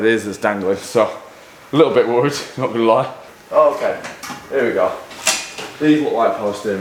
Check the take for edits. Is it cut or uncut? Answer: uncut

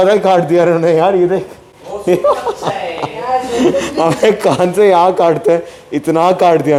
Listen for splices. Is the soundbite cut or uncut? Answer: uncut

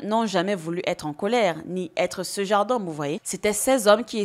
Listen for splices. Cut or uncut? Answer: cut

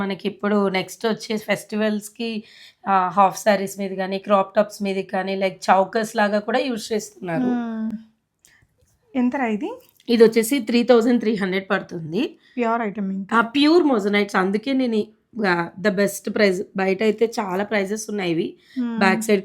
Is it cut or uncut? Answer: uncut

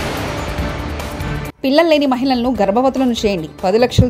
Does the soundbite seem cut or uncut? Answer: cut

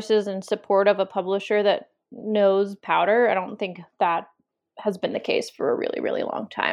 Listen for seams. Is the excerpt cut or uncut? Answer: uncut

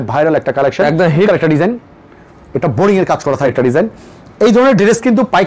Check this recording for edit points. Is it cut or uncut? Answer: cut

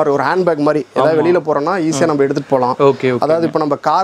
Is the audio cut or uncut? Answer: uncut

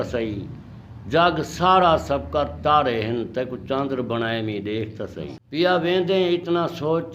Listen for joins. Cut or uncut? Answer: cut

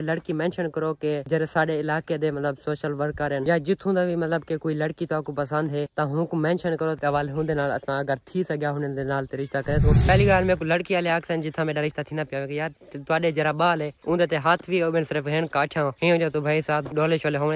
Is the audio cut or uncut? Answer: cut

